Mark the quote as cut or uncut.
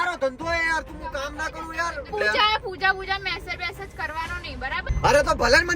cut